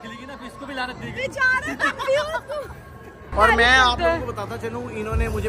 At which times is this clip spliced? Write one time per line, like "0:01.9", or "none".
0:03.3